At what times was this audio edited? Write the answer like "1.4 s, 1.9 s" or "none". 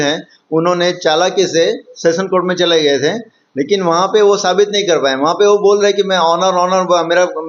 none